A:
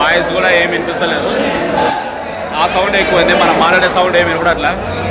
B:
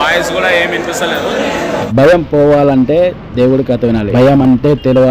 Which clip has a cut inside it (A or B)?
B